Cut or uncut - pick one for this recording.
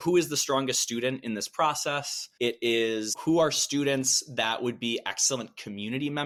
uncut